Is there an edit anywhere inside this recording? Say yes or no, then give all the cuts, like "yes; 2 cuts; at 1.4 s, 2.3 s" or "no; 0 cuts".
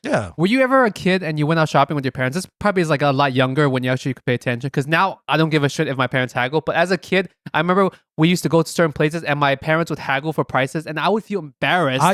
no; 0 cuts